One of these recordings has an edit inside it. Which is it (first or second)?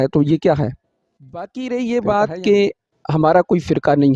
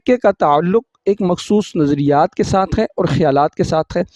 first